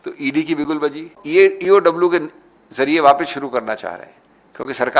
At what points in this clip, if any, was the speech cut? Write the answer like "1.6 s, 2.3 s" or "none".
1.2 s